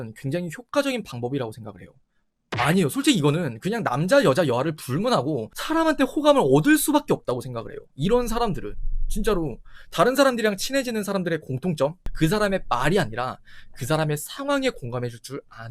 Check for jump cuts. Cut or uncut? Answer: cut